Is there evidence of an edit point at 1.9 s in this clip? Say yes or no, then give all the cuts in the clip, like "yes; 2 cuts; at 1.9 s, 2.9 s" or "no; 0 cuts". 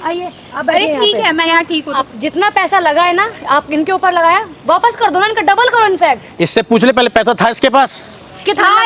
yes; 1 cut; at 1.9 s